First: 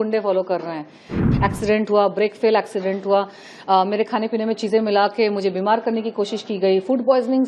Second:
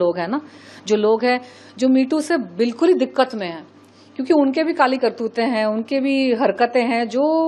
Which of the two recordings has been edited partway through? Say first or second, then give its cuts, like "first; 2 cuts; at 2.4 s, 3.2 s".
first; 1 cut; at 1.1 s